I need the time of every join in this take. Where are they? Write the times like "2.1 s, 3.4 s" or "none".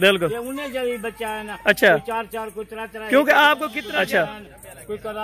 3.8 s